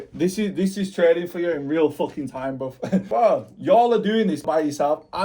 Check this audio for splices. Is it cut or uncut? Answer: cut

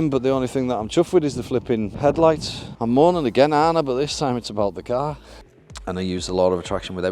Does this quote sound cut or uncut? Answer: cut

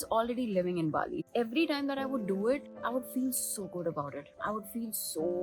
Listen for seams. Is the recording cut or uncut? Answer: cut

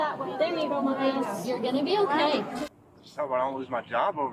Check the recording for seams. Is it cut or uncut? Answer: cut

